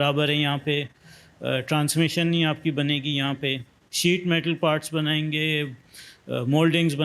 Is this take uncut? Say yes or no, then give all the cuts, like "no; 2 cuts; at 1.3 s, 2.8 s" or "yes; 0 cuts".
yes; 0 cuts